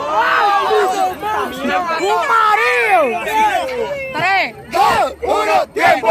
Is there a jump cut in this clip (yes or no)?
yes